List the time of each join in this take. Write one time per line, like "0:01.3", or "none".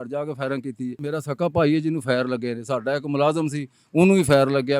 0:01.0